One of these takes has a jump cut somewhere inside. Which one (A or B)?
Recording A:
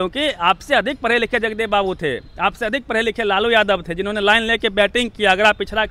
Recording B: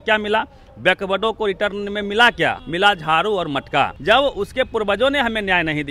B